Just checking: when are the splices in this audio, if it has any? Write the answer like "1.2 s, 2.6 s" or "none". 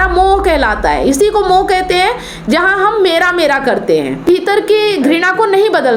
4.2 s